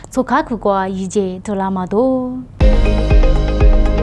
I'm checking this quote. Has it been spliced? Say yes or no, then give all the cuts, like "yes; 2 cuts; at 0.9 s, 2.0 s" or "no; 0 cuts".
yes; 1 cut; at 2.5 s